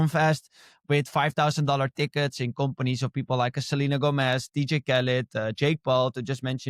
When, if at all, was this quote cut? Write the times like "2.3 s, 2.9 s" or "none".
none